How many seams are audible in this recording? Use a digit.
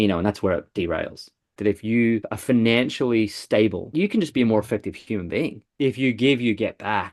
4